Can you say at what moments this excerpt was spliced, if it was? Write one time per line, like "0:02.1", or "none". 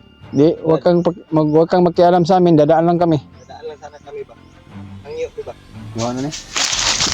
0:06.0

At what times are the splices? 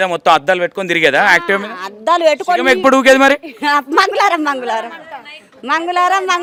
none

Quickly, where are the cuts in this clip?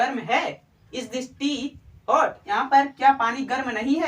0:02.4

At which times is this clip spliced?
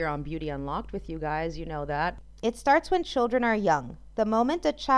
0:02.2

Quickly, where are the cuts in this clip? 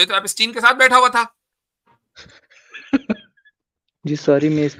none

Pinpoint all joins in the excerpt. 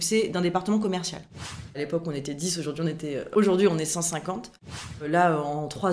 0:01.7
0:03.3
0:05.0

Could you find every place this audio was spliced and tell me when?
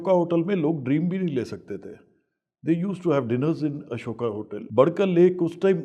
0:04.6

